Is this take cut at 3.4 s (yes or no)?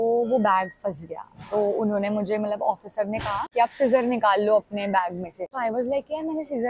yes